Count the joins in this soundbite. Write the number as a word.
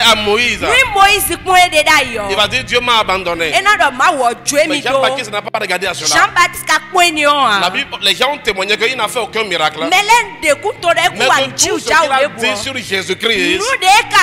zero